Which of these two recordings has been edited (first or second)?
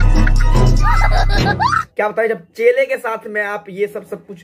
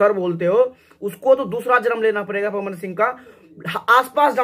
first